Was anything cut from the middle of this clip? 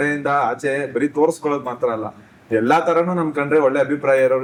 no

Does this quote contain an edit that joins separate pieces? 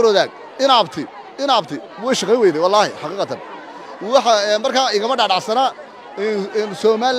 no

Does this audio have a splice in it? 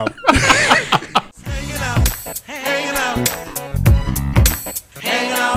yes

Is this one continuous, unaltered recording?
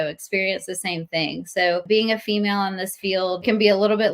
no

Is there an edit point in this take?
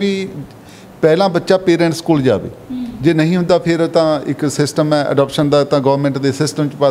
no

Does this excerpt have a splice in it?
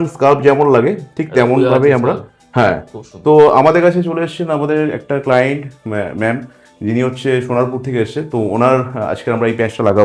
no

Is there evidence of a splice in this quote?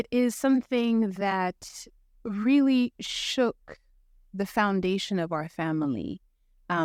no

